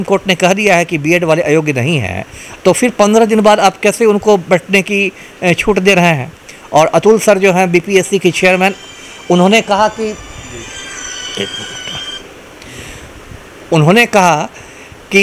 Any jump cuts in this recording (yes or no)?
no